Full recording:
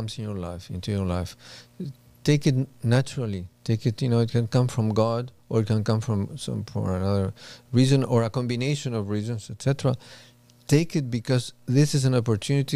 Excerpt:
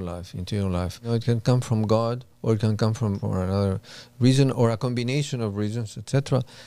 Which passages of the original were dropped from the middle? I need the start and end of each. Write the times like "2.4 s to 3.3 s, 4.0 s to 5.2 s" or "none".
1.5 s to 4.2 s, 6.3 s to 6.7 s